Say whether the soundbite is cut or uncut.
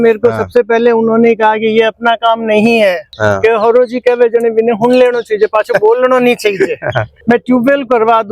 cut